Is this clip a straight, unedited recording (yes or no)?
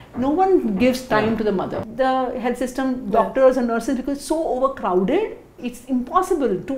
no